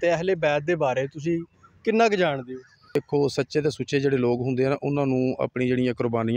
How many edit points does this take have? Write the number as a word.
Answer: one